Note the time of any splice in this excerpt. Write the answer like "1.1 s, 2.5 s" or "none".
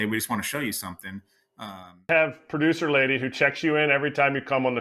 2.1 s